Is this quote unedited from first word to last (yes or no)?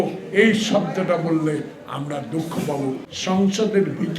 no